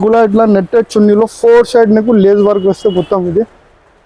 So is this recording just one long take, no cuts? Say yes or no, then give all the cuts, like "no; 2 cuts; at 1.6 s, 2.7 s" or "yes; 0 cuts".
yes; 0 cuts